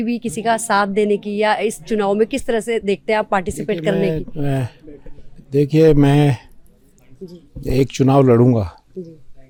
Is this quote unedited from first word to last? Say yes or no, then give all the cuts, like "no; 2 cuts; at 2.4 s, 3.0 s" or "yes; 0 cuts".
yes; 0 cuts